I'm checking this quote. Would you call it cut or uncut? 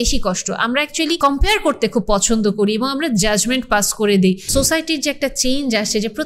cut